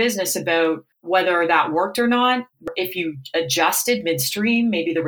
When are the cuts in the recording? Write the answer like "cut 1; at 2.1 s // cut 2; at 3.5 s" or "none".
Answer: cut 1; at 0.9 s // cut 2; at 2.7 s